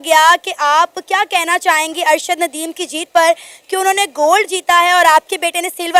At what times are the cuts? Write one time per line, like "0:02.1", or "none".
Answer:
none